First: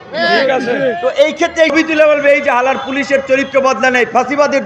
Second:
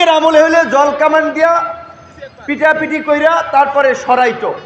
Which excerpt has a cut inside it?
first; 1 cut; at 1.7 s

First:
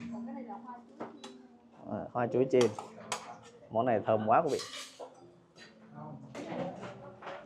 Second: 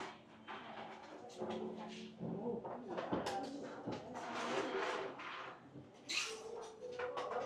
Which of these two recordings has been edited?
first; 1 cut; at 6.4 s

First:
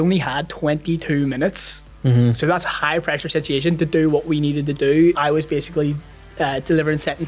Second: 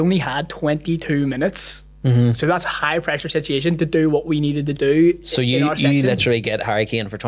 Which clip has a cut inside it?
first; 1 cut; at 5.2 s

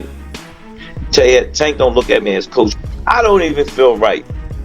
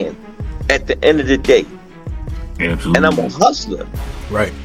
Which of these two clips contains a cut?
first; 1 cut; at 2.8 s

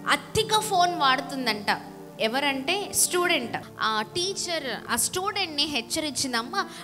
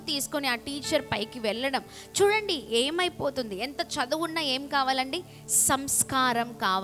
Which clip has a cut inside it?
first; 2 cuts; at 3.7 s, 4.8 s

